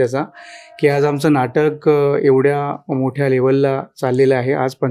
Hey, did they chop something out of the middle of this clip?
no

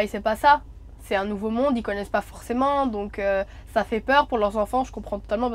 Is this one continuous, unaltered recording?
yes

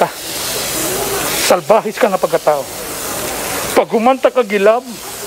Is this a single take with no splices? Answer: yes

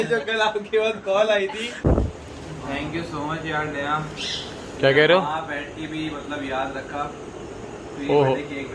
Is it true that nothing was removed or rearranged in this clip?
no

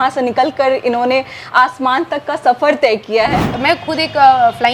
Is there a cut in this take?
yes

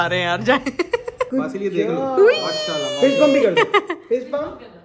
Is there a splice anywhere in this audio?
yes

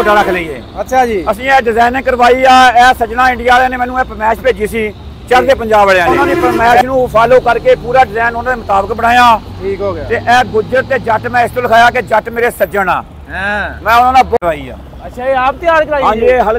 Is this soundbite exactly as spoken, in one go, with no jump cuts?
no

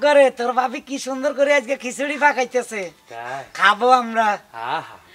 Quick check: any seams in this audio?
no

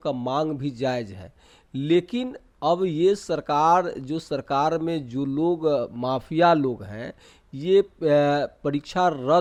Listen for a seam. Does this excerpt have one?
no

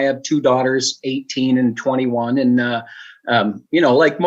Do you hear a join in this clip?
no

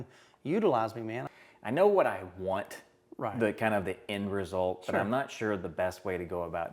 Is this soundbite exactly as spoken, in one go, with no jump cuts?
no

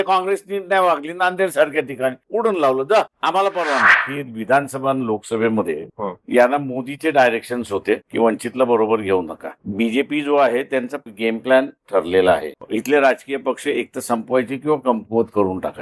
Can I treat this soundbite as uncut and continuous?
no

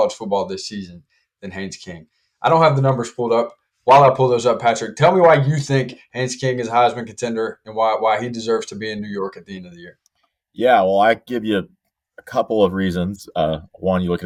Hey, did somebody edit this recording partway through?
no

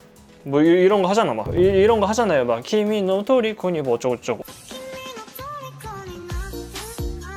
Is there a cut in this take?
yes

